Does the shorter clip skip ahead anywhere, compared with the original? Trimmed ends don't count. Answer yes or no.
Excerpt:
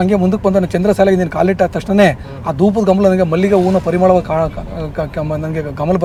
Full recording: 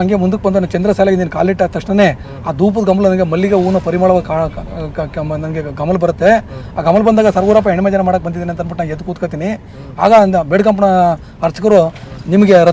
no